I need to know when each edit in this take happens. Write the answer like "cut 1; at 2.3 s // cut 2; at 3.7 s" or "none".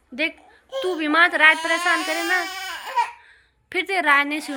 none